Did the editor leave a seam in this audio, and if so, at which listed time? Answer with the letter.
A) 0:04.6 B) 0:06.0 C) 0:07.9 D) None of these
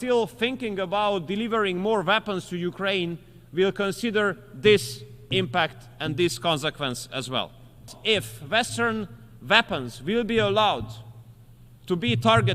C